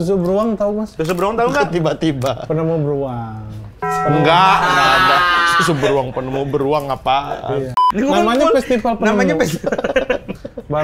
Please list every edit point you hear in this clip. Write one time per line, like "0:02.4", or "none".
0:07.8